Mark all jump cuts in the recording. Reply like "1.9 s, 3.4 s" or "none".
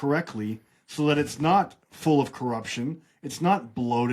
none